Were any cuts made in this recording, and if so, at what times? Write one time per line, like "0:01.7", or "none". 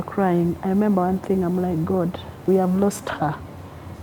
0:02.4